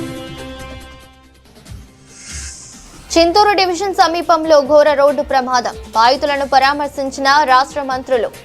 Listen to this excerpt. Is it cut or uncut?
cut